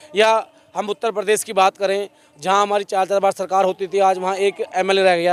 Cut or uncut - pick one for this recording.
uncut